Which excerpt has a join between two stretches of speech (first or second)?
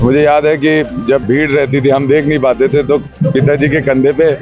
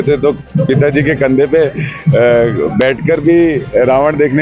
first